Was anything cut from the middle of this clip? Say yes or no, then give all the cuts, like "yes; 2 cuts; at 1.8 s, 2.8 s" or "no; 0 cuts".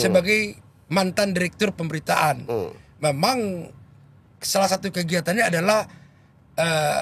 no; 0 cuts